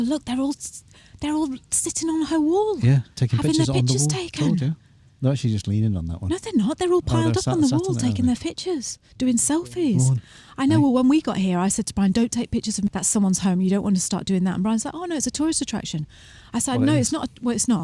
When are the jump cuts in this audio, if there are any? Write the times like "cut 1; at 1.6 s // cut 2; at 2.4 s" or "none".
cut 1; at 12.9 s